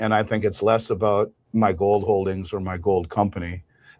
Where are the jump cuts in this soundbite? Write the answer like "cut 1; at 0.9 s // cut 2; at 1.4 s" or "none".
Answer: cut 1; at 1.4 s